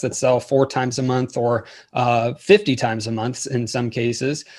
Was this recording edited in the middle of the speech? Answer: no; 0 cuts

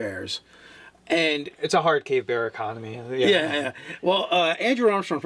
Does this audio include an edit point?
yes; 1 cut; at 3.9 s

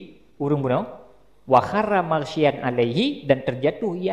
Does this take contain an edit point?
no; 0 cuts

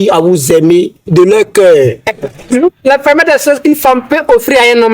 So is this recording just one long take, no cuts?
no; 2 cuts; at 1.0 s, 2.4 s

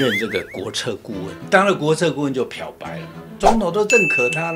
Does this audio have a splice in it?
yes; 2 cuts; at 1.3 s, 3.4 s

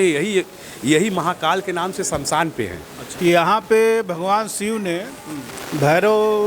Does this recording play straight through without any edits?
no; 1 cut; at 3.0 s

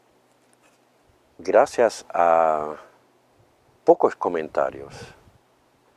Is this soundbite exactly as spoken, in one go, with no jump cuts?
no; 1 cut; at 1.7 s

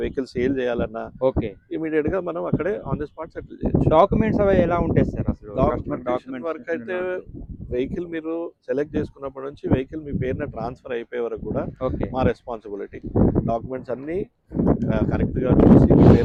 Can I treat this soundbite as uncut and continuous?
yes; 0 cuts

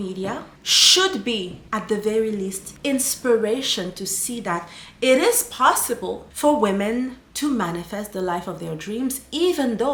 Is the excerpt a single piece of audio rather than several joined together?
yes; 0 cuts

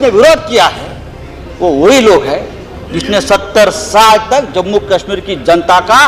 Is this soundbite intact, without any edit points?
yes; 0 cuts

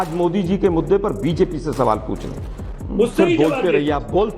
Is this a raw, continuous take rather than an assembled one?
no; 1 cut; at 2.6 s

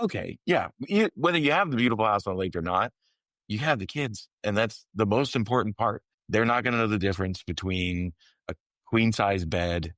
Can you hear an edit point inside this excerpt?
yes; 1 cut; at 6.1 s

